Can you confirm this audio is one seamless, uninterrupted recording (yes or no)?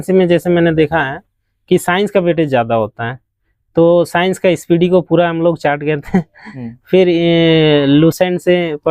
yes